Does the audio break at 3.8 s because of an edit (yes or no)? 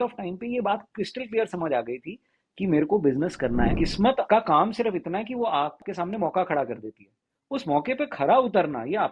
yes